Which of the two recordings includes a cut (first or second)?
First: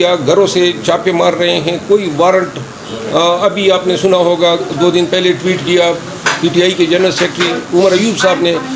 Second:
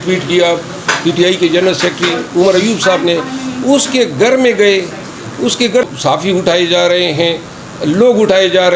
second